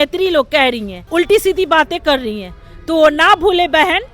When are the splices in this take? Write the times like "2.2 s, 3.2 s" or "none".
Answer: 0.9 s